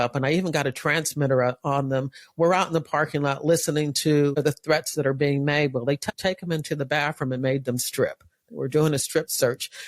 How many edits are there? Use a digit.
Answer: 2